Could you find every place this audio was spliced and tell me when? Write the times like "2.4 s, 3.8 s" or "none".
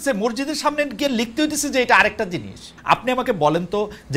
2.7 s